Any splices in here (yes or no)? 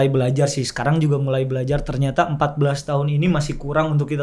no